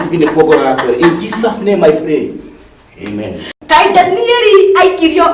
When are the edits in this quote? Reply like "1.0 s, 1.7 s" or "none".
3.5 s